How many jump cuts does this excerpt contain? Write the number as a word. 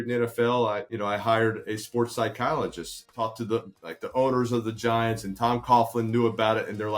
two